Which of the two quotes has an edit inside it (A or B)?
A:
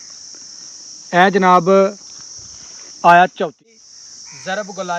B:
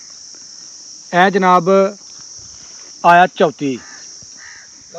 A